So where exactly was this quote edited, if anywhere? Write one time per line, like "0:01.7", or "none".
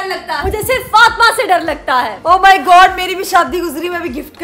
0:02.1